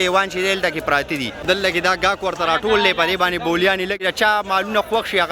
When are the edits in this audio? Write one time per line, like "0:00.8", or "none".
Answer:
0:01.5
0:04.0